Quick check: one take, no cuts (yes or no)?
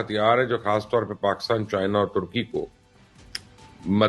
yes